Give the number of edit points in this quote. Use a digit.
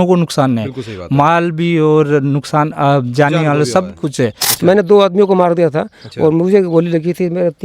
1